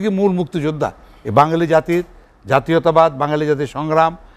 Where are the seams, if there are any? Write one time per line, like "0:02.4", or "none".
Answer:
none